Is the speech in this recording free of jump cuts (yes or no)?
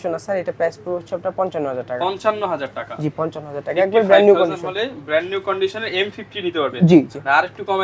yes